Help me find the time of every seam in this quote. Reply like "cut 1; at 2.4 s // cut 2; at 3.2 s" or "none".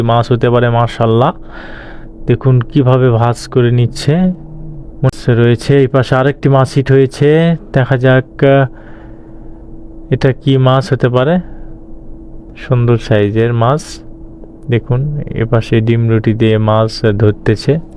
cut 1; at 5.1 s